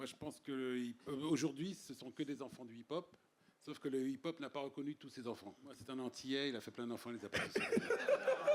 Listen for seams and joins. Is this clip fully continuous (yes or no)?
no